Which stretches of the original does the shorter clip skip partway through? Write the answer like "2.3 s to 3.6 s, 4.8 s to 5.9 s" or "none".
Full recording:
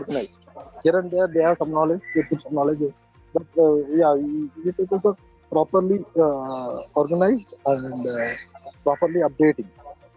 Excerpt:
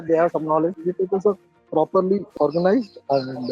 2.0 s to 4.6 s, 6.1 s to 6.8 s